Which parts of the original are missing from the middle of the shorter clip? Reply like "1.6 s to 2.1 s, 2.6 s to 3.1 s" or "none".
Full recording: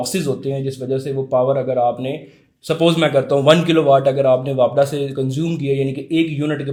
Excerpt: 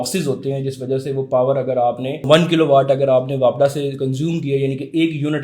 2.3 s to 3.4 s